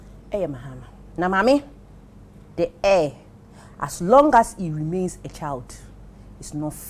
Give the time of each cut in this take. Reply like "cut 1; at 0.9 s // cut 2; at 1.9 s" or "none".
none